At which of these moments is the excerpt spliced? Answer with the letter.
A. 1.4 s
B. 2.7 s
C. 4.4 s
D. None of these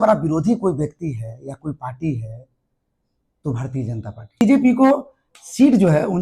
C